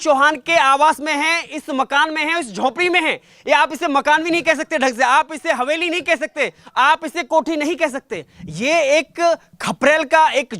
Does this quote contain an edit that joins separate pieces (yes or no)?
no